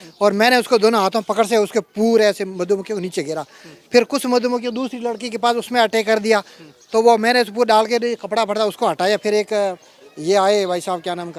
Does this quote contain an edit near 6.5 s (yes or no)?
no